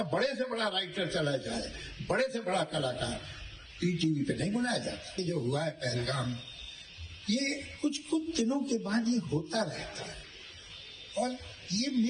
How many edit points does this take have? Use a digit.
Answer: 1